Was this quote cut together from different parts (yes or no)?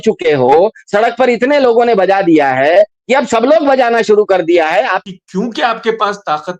yes